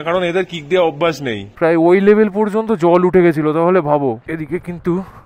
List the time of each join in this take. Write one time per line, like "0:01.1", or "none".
0:01.5
0:04.3